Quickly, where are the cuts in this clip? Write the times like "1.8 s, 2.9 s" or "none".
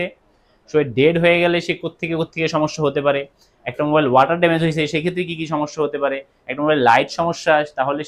none